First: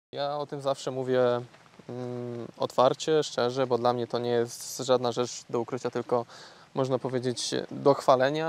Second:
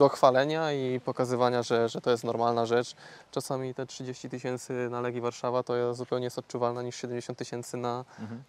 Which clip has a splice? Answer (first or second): second